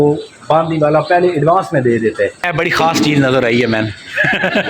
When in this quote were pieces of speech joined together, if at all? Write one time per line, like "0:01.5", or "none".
0:02.4